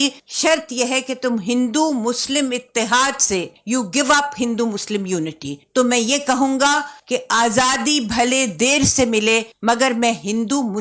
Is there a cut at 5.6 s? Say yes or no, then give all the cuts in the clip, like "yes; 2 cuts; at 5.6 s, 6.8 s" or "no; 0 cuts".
no; 0 cuts